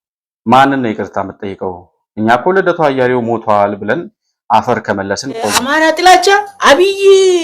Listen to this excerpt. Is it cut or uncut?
cut